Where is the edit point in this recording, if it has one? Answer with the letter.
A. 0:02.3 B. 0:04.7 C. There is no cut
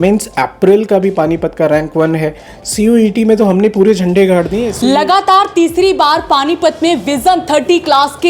B